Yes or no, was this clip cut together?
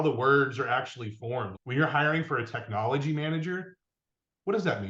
yes